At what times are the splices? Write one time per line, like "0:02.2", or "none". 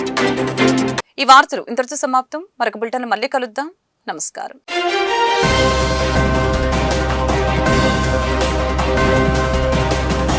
none